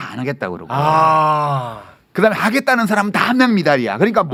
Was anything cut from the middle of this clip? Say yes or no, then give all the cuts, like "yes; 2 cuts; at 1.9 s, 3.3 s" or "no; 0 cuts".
no; 0 cuts